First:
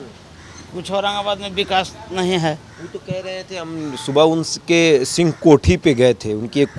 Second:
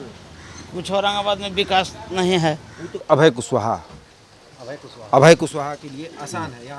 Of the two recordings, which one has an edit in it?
second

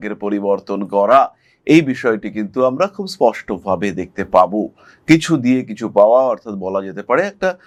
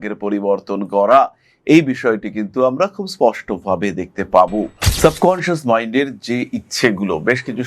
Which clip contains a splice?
second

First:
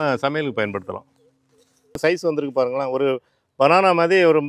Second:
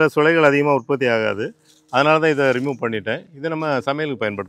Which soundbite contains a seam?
first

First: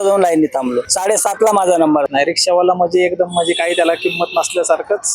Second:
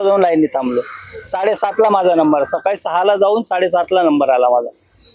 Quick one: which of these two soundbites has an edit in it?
first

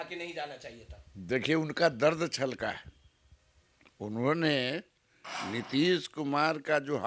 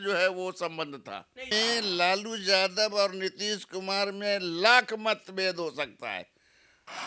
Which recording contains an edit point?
second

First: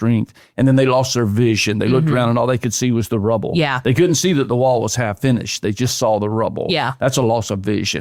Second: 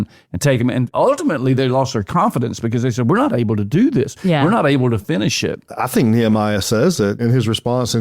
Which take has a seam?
second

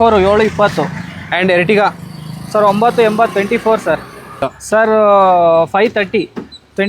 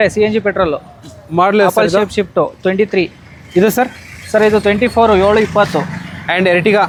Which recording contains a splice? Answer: first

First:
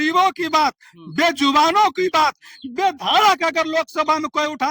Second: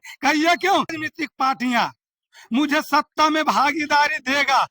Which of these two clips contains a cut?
second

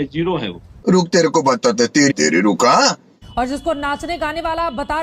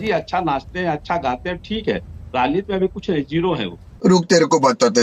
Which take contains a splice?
first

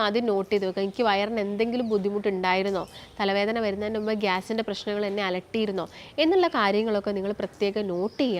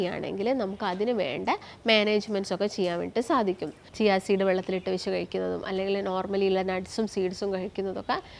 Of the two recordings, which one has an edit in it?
second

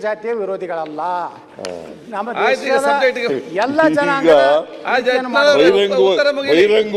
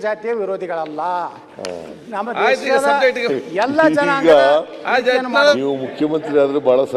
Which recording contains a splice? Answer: second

